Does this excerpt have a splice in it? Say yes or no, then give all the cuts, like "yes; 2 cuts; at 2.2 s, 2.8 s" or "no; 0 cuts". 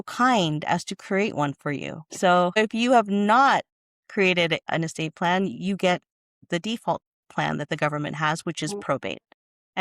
yes; 1 cut; at 4.7 s